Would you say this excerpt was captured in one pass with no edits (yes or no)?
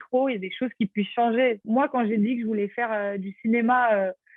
no